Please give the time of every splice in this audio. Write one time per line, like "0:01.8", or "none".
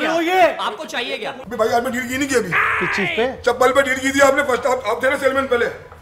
0:01.3